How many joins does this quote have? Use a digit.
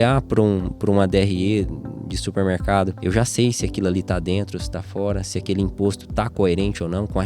1